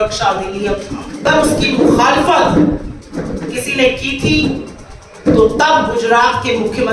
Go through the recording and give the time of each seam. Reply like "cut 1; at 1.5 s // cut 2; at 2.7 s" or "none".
cut 1; at 1.3 s